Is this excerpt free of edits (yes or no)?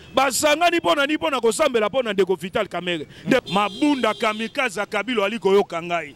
no